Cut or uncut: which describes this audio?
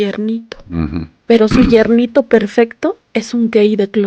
cut